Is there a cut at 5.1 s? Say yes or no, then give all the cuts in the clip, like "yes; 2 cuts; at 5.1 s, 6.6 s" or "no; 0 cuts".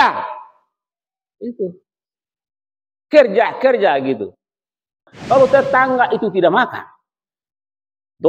yes; 1 cut; at 5.1 s